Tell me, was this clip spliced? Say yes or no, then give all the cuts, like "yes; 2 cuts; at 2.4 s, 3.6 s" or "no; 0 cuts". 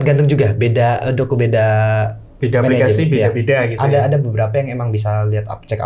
no; 0 cuts